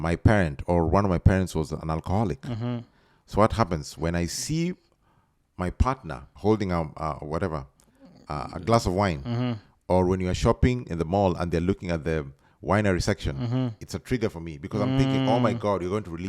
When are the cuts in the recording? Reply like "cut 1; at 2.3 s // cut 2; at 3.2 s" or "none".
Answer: cut 1; at 6.3 s